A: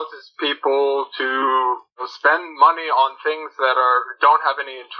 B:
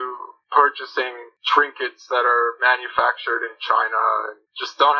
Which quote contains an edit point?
A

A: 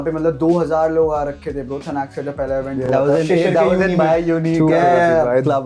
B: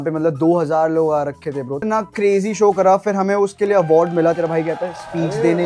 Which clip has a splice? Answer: B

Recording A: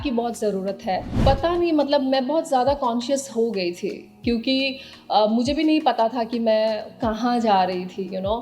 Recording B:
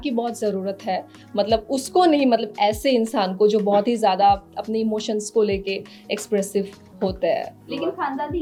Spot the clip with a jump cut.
A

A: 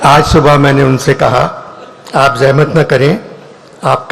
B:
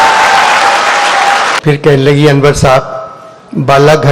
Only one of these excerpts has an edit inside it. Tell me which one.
B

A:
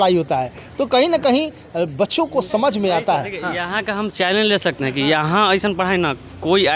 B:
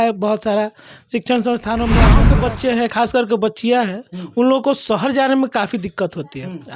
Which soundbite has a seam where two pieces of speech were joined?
B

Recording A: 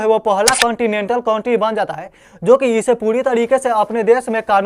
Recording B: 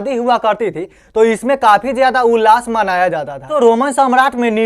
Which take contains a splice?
B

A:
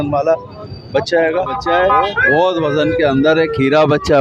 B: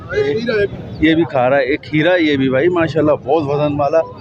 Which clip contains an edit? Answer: A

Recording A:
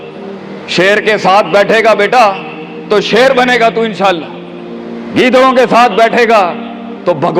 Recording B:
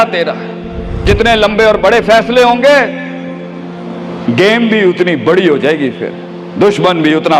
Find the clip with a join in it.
B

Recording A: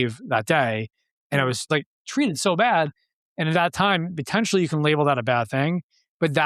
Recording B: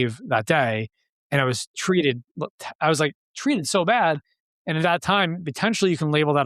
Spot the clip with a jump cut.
A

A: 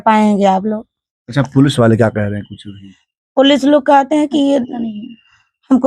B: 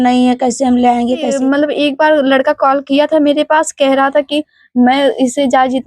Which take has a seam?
B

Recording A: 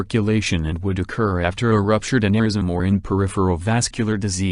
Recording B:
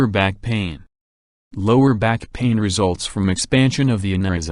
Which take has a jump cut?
A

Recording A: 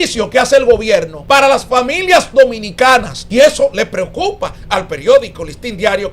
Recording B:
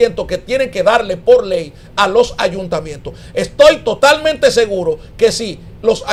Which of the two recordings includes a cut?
A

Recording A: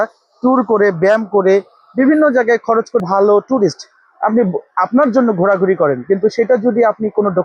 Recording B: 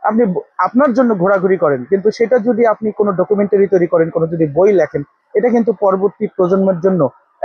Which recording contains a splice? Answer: A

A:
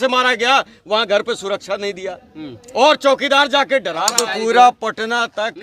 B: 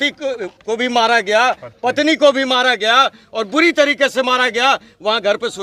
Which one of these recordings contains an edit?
A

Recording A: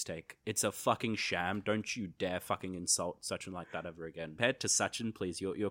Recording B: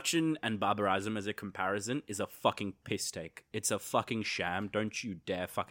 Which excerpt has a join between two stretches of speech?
A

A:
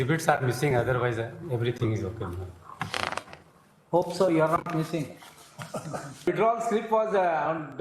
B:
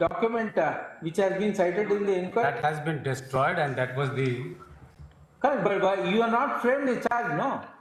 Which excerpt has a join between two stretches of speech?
A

